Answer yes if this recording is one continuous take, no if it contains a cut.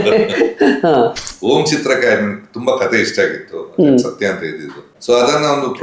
no